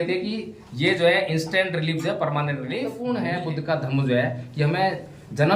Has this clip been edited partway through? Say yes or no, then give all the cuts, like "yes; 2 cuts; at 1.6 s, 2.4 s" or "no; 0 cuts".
yes; 1 cut; at 3.0 s